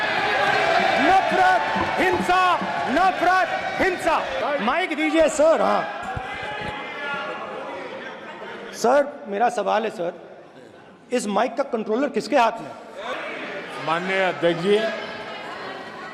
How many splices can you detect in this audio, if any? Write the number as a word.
two